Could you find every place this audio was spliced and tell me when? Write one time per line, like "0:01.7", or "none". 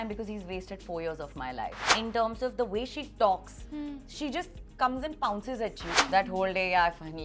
0:01.8
0:05.9